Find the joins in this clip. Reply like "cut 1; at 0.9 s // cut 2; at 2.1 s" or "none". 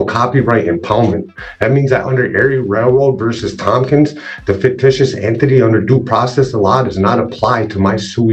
none